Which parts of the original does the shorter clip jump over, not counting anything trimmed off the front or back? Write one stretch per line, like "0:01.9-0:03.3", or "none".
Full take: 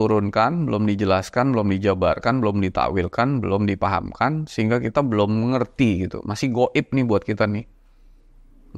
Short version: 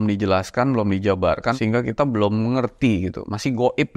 0:02.3-0:04.5